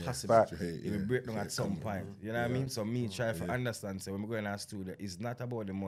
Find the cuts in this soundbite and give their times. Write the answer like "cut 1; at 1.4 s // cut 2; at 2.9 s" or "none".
none